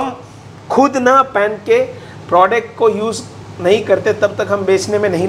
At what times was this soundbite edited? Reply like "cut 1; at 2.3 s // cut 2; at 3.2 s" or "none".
none